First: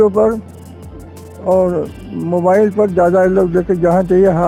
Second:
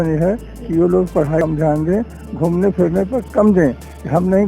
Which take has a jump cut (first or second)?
second